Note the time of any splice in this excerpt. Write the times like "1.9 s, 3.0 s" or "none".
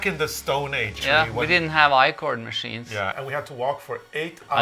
0.9 s, 3.1 s